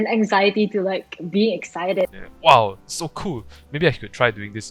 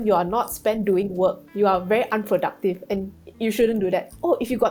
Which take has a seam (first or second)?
first